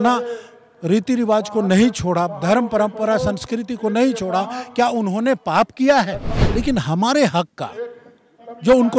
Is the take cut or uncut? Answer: cut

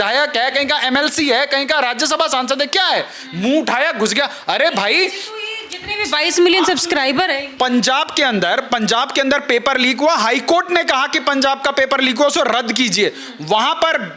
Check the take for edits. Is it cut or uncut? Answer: uncut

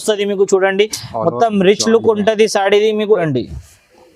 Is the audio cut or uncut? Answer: cut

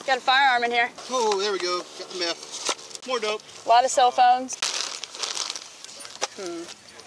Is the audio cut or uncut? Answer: cut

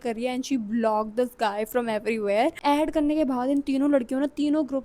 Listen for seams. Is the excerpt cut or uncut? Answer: cut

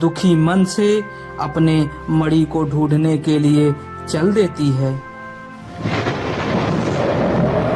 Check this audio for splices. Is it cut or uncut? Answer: uncut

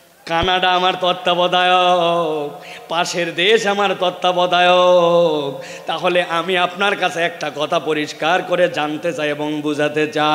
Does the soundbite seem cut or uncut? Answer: uncut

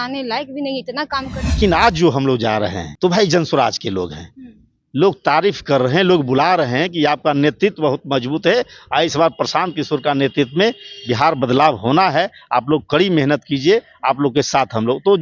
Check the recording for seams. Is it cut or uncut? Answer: cut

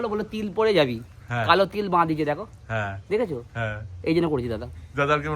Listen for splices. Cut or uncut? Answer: uncut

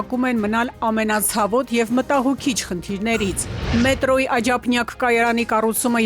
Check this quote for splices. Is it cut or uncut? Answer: cut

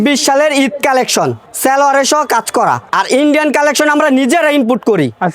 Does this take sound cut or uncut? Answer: cut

